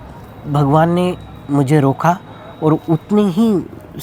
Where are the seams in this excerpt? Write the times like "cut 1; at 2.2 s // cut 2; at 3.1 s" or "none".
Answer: none